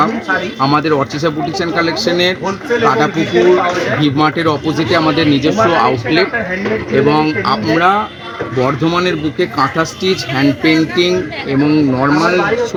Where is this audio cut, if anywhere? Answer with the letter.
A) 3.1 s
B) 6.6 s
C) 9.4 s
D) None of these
D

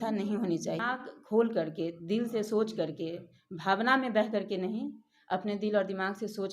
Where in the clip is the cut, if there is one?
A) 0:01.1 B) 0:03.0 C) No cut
A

